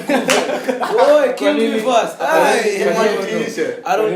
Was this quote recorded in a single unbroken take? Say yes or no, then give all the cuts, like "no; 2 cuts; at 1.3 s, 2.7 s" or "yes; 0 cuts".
yes; 0 cuts